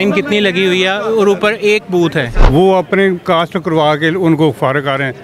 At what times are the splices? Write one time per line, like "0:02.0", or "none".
0:02.4